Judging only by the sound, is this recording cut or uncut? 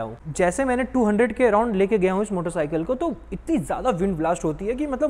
uncut